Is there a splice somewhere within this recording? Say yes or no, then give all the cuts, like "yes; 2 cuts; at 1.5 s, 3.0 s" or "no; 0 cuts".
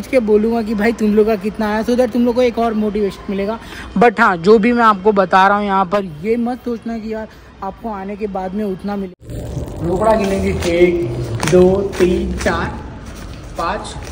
yes; 1 cut; at 9.1 s